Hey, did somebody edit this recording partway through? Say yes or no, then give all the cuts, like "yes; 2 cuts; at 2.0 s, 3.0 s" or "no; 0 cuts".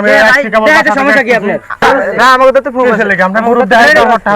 yes; 1 cut; at 1.8 s